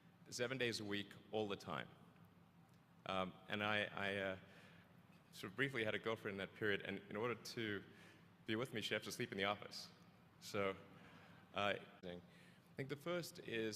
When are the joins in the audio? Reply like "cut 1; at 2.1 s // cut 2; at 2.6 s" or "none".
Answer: none